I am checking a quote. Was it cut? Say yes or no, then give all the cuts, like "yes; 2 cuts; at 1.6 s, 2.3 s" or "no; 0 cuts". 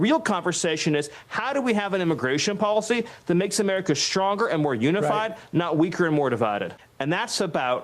yes; 1 cut; at 6.8 s